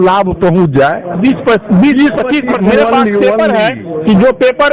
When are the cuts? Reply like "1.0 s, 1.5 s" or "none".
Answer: 3.3 s